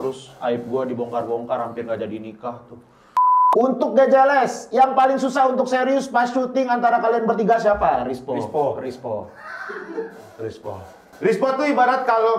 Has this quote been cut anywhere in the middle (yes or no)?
yes